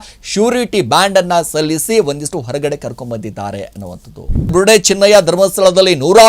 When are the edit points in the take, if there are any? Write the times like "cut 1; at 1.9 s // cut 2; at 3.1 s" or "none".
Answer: cut 1; at 4.5 s